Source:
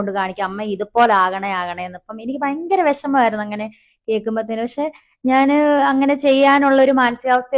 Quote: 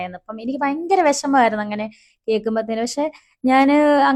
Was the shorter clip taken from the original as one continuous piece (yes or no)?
yes